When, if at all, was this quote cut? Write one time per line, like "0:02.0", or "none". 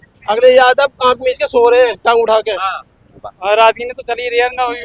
0:03.3